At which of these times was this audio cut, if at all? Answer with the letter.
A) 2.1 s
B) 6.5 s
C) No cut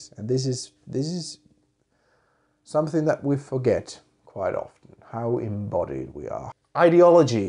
B